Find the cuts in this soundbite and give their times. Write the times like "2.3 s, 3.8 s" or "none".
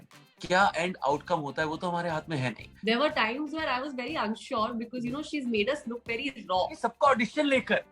2.7 s, 6.7 s